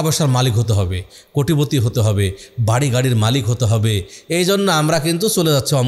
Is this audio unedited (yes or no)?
yes